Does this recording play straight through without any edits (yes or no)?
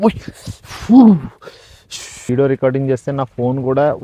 no